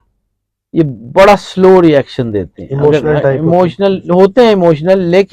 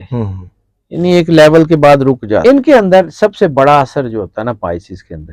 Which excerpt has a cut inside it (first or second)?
second